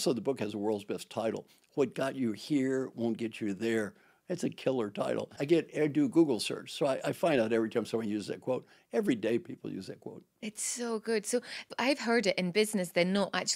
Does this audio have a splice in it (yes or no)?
yes